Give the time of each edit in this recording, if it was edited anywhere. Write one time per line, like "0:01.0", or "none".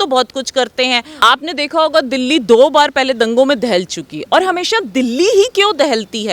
0:01.1

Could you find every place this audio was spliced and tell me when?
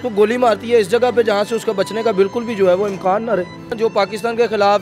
0:03.7

